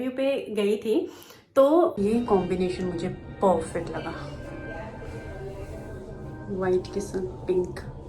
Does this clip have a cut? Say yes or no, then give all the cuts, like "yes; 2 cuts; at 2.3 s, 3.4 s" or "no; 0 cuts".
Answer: yes; 1 cut; at 1.9 s